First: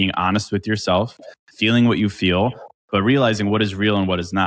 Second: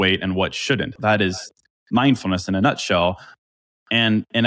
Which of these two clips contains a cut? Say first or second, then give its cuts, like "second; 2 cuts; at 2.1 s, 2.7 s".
second; 1 cut; at 0.9 s